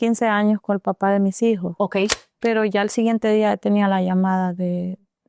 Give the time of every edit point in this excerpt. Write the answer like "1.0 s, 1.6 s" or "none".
2.2 s